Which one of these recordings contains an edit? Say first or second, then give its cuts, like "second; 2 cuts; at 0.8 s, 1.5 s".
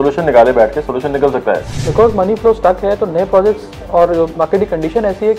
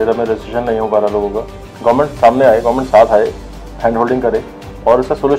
first; 1 cut; at 1.7 s